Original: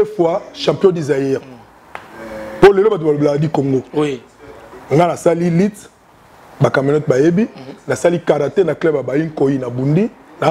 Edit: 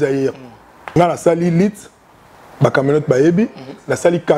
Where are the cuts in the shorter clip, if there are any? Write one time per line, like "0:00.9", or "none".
0:01.0